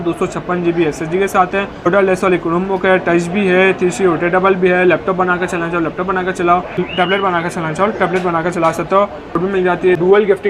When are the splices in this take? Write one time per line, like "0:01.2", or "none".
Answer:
0:01.9
0:06.8
0:09.5